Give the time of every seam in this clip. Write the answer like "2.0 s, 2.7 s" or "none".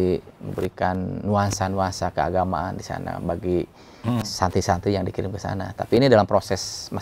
none